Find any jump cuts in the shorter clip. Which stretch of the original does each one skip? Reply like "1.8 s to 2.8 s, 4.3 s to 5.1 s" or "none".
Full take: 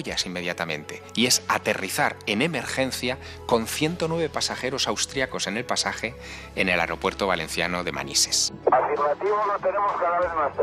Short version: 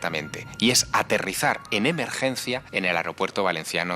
3.2 s to 6.5 s